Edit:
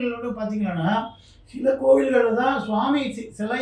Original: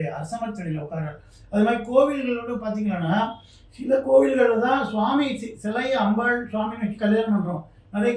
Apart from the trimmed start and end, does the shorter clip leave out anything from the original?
no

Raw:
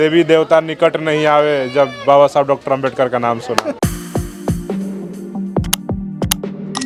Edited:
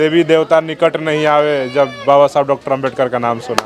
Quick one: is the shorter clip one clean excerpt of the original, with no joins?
yes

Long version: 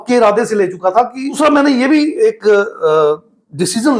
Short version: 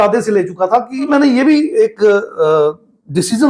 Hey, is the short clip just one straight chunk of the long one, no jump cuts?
no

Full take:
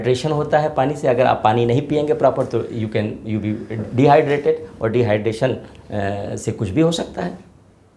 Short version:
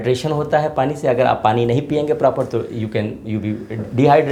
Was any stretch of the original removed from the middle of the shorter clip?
no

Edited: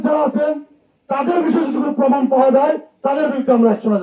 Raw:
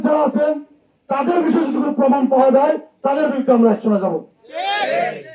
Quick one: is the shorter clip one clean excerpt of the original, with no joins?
yes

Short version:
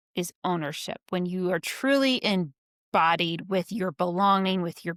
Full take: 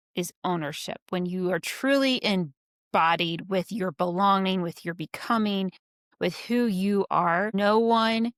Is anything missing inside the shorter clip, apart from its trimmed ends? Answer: no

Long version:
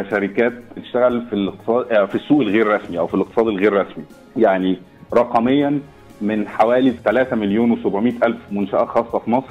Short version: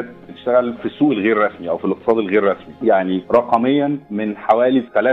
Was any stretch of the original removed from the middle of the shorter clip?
yes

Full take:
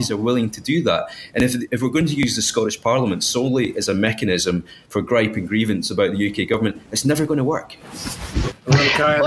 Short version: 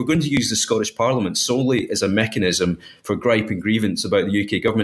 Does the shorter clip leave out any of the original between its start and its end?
no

